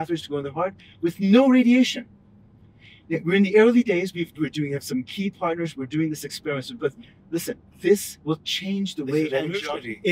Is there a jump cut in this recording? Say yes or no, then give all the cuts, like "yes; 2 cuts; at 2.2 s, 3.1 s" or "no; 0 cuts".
no; 0 cuts